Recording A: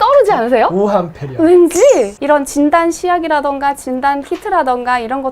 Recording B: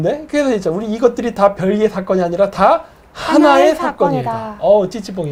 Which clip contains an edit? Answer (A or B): A